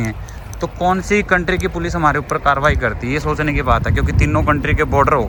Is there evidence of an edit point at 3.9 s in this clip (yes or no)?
no